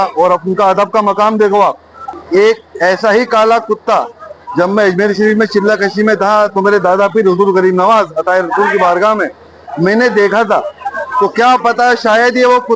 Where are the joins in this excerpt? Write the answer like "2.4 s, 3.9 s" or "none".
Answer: 2.2 s